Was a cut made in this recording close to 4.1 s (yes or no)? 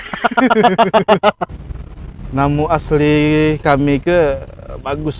no